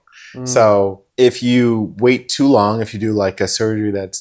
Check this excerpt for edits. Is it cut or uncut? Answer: cut